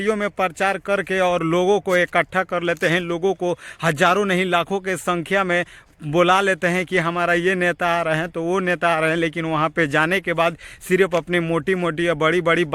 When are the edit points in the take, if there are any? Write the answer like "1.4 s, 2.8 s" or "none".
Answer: none